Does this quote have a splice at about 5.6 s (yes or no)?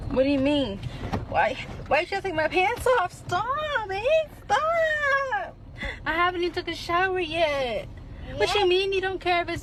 no